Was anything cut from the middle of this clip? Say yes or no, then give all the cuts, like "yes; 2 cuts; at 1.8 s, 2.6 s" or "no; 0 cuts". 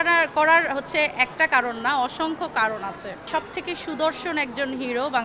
yes; 1 cut; at 3.3 s